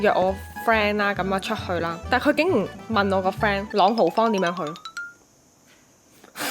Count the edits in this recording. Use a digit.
1